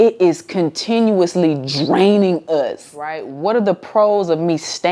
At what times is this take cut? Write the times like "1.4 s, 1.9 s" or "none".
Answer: 3.2 s